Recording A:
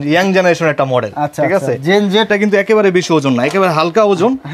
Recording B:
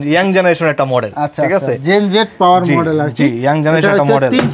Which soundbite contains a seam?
A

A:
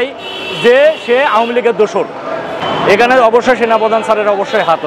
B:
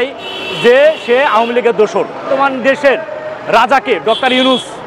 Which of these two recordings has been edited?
B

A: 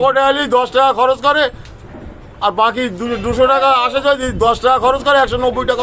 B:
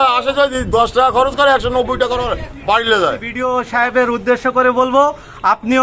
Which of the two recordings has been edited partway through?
B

